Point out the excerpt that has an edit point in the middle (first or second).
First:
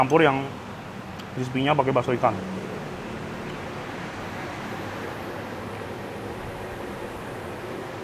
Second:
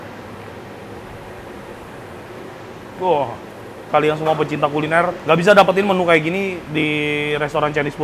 second